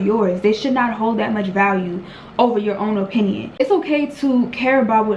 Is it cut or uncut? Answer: cut